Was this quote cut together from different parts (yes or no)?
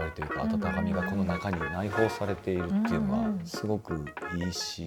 no